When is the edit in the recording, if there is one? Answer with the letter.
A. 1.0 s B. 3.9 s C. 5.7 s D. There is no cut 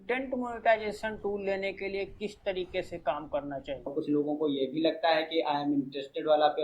B